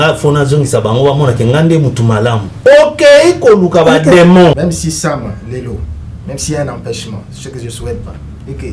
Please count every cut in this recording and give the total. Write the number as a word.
one